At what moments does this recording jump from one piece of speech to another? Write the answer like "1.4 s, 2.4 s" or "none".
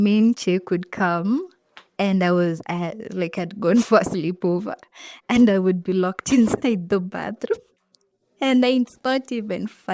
none